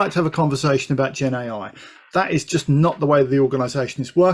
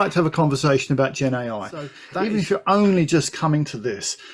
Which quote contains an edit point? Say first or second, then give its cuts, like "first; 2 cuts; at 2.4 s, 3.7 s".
second; 1 cut; at 2.0 s